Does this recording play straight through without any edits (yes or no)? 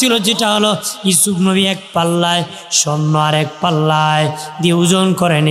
yes